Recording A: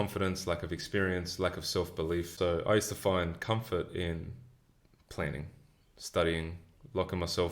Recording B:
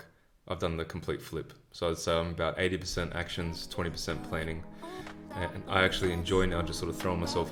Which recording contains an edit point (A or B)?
A